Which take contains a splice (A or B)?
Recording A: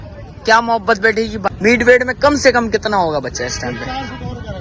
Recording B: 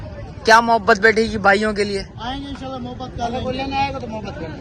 A